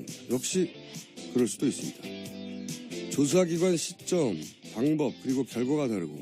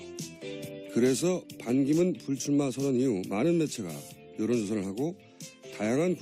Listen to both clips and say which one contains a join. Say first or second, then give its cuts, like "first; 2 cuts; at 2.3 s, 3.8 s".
first; 1 cut; at 5.1 s